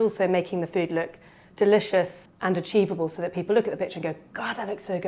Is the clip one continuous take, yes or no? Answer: no